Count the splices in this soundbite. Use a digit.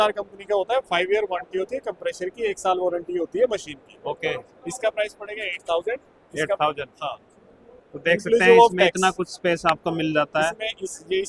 0